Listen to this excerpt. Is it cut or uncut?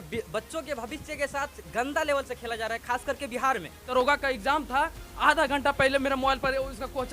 cut